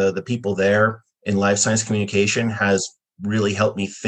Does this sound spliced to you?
no; 0 cuts

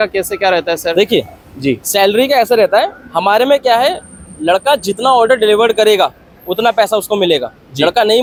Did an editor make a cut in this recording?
no; 0 cuts

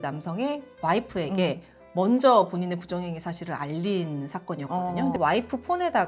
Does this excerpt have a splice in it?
yes; 1 cut; at 5.2 s

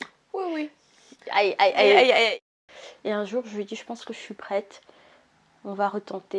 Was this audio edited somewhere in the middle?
yes; 1 cut; at 2.3 s

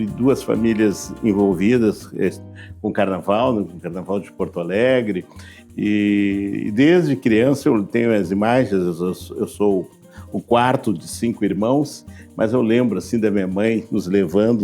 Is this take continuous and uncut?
yes; 0 cuts

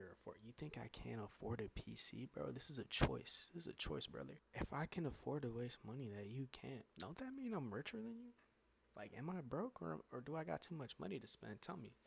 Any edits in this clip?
yes; 1 cut; at 4.4 s

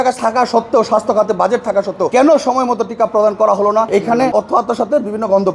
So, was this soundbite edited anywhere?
yes; 2 cuts; at 2.1 s, 4.2 s

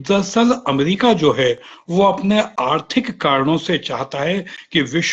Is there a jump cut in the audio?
no; 0 cuts

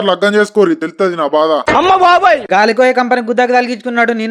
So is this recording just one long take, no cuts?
yes; 0 cuts

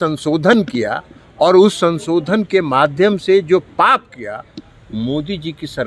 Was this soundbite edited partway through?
no; 0 cuts

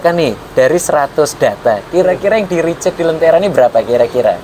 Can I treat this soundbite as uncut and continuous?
yes; 0 cuts

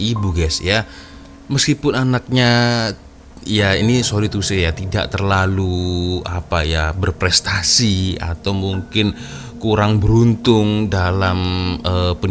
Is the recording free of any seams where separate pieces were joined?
yes; 0 cuts

